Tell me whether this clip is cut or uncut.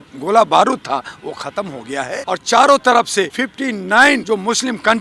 cut